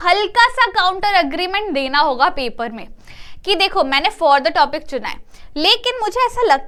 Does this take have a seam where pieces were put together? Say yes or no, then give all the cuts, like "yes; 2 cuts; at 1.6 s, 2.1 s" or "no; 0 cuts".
no; 0 cuts